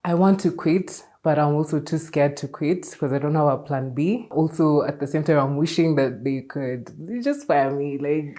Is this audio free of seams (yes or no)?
yes